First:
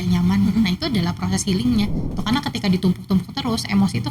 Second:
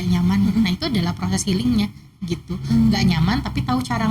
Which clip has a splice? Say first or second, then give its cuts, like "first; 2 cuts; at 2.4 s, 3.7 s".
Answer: first; 1 cut; at 2.2 s